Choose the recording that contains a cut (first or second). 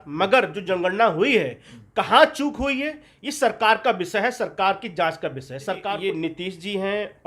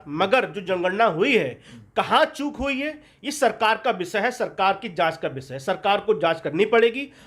first